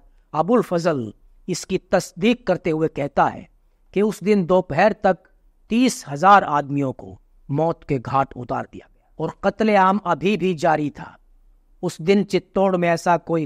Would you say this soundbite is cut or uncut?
uncut